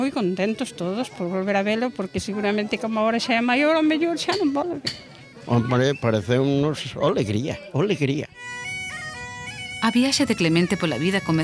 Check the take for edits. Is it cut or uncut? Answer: uncut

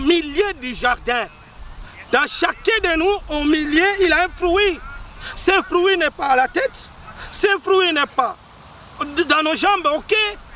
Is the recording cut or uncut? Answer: uncut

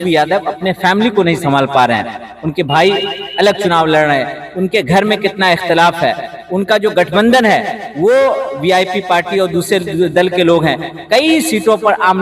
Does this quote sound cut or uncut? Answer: uncut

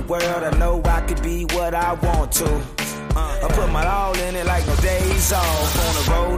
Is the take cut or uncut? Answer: uncut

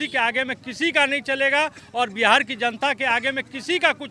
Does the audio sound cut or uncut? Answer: uncut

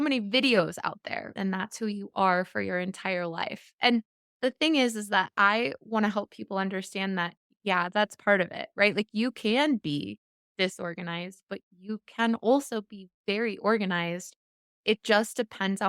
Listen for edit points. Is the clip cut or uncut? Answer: cut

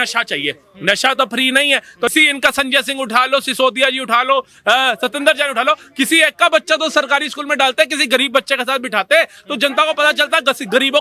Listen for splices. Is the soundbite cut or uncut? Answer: cut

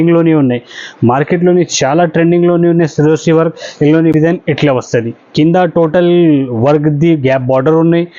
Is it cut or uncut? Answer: cut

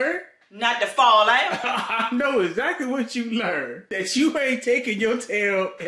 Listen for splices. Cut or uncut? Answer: cut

